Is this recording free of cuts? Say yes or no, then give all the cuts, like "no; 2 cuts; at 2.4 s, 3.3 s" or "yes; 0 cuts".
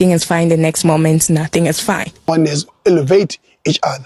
no; 1 cut; at 2.3 s